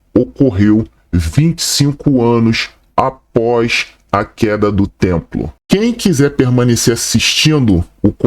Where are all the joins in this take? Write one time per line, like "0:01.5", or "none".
0:05.6